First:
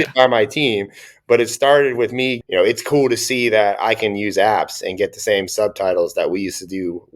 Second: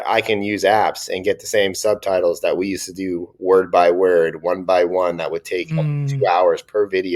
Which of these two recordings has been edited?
first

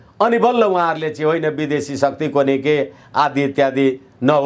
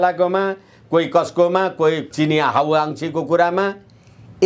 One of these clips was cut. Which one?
second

